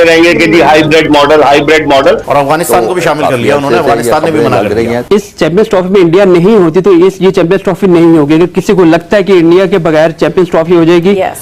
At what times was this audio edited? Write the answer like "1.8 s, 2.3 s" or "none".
2.3 s, 5.1 s